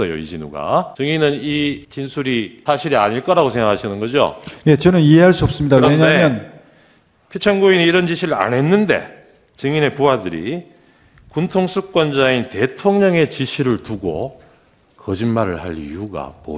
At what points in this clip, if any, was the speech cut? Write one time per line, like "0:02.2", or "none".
0:00.9
0:02.2